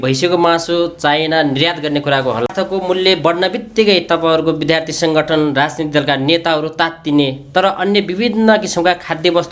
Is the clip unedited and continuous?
no; 1 cut; at 2.5 s

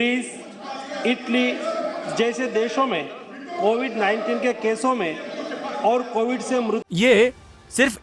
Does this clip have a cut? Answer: yes; 1 cut; at 6.9 s

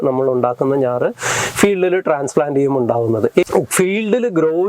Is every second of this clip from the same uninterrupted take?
no; 1 cut; at 3.5 s

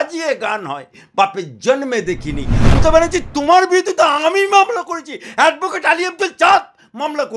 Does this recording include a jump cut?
yes; 1 cut; at 2.7 s

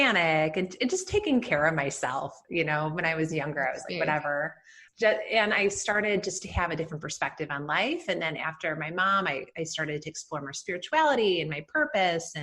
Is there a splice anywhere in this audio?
no; 0 cuts

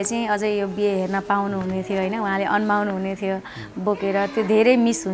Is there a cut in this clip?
no; 0 cuts

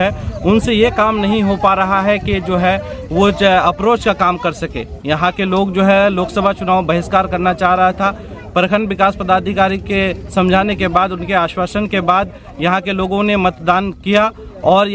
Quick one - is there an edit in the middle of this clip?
no; 0 cuts

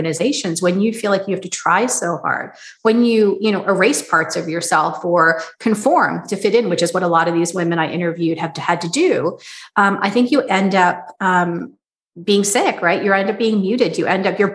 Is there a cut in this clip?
no; 0 cuts

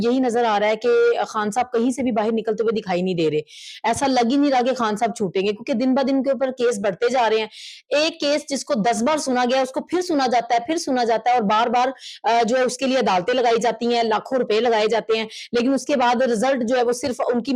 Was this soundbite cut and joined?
no; 0 cuts

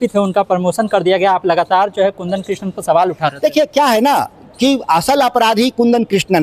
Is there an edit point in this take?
no; 0 cuts

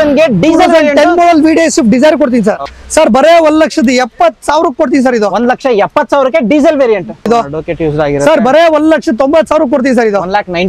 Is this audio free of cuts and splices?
no; 2 cuts; at 2.7 s, 7.2 s

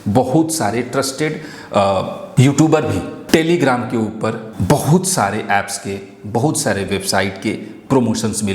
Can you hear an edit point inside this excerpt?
yes; 3 cuts; at 2.2 s, 3.2 s, 4.5 s

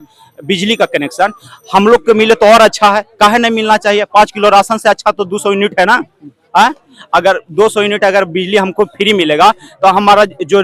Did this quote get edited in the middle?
no; 0 cuts

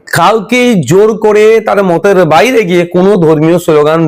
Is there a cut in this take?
no; 0 cuts

